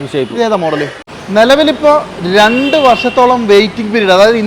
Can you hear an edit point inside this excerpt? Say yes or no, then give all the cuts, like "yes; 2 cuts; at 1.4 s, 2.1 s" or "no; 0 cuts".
yes; 1 cut; at 1.2 s